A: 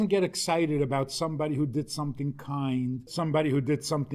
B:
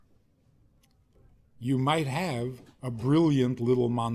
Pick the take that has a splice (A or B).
A